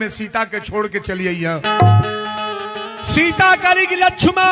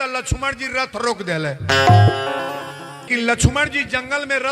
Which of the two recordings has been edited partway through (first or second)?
second